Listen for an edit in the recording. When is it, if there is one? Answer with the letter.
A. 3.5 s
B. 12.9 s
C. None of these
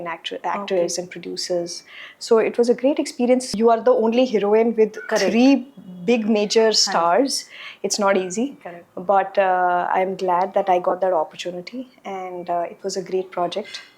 A